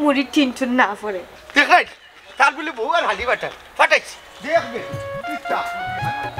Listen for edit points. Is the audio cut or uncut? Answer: uncut